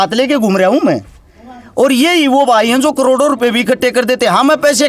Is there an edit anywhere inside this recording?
no; 0 cuts

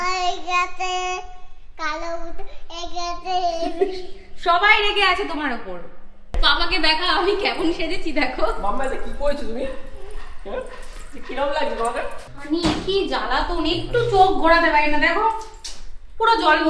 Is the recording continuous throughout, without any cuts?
no; 2 cuts; at 6.3 s, 12.3 s

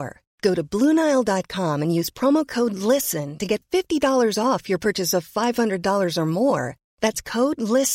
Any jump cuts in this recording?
no; 0 cuts

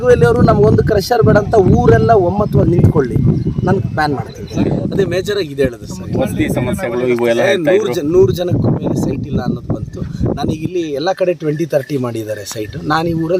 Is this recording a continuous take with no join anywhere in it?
yes; 0 cuts

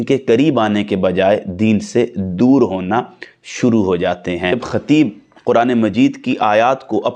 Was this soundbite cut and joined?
yes; 1 cut; at 4.5 s

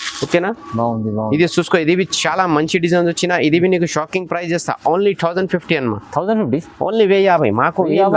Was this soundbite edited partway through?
no; 0 cuts

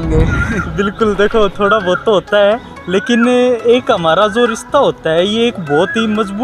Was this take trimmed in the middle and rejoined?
no; 0 cuts

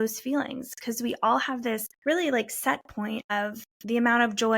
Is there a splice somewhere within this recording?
yes; 2 cuts; at 1.9 s, 3.3 s

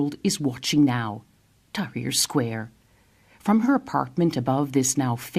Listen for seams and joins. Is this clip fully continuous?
no; 1 cut; at 3.7 s

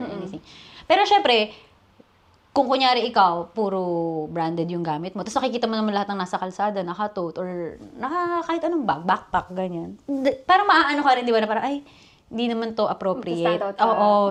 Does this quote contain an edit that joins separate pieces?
no; 0 cuts

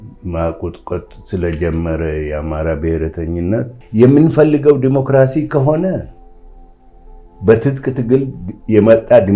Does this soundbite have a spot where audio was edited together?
yes; 1 cut; at 3.8 s

